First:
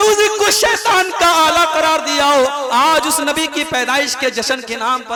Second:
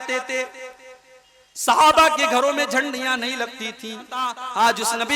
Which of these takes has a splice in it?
second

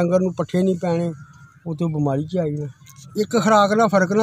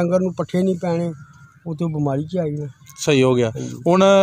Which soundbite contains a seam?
first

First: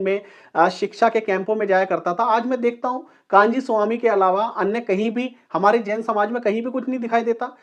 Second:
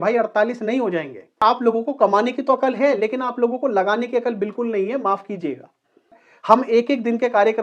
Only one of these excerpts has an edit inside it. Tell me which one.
second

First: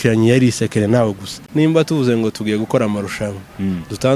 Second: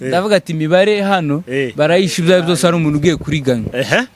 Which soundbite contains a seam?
first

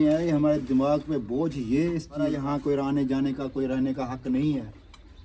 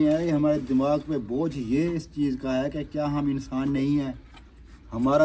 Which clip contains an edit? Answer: first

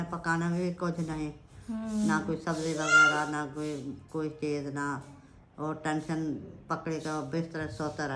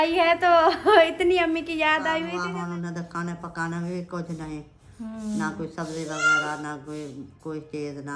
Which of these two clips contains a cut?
second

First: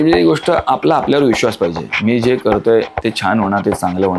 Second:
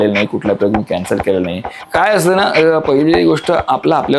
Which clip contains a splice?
second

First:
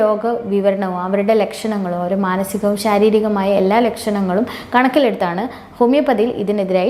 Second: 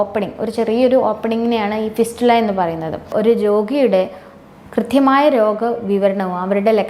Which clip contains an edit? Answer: second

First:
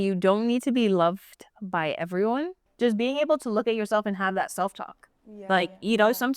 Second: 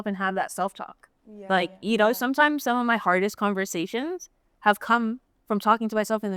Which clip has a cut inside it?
first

